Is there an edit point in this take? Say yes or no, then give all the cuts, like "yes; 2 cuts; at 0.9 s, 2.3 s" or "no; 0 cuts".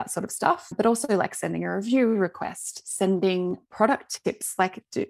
no; 0 cuts